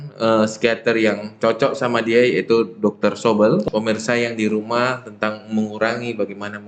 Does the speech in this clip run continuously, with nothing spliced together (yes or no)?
no